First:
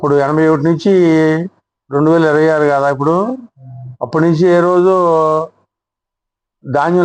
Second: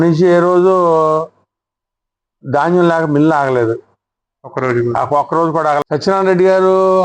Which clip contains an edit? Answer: second; 1 cut; at 5.8 s

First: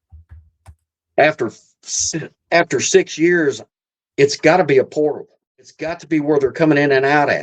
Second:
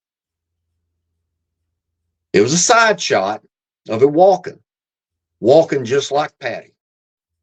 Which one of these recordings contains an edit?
first; 1 cut; at 6.0 s

